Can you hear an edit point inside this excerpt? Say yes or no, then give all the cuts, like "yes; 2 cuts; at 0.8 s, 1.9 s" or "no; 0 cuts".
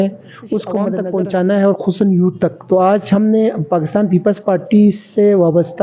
yes; 1 cut; at 1.0 s